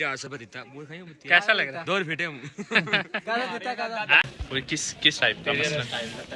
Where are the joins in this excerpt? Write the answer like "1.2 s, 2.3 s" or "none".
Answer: 4.3 s